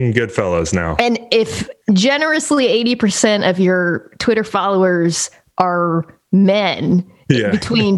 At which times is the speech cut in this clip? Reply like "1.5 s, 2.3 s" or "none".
1.7 s